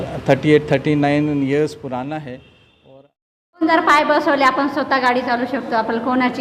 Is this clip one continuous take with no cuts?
no; 1 cut; at 3.6 s

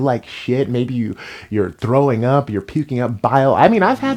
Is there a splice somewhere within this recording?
no; 0 cuts

